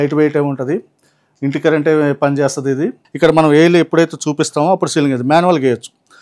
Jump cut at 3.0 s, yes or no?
yes